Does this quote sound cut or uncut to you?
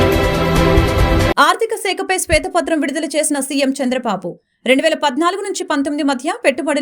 cut